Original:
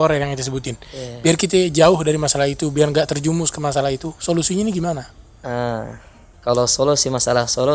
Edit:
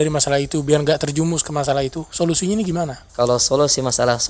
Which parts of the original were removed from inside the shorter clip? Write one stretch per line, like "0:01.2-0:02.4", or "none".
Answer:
0:05.1-0:06.3